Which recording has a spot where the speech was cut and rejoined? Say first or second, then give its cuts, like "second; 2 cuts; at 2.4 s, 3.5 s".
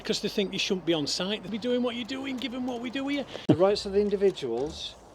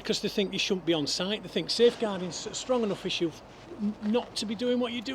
first; 2 cuts; at 1.4 s, 3.4 s